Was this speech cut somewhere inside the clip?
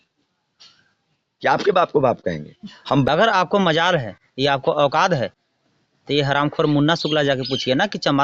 yes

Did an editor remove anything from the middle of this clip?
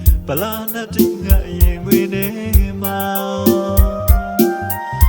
no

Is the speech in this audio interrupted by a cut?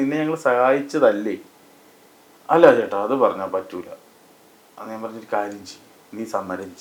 no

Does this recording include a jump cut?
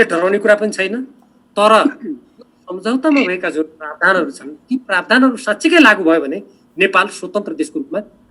no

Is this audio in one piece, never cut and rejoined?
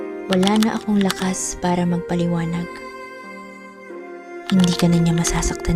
no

